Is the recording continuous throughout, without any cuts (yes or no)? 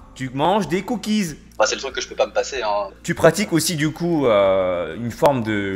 no